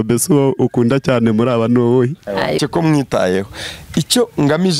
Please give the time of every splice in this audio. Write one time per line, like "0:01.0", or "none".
0:02.6